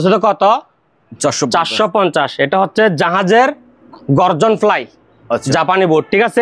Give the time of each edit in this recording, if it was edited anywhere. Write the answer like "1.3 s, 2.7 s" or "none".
none